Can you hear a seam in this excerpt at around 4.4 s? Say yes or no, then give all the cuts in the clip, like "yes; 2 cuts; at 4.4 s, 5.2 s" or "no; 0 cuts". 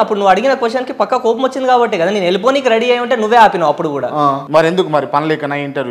yes; 1 cut; at 4.4 s